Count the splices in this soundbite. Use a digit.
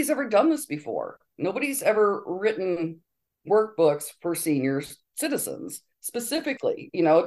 0